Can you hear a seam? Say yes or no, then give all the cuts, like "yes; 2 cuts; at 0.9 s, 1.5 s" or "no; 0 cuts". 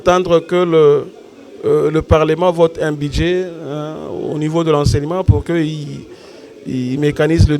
no; 0 cuts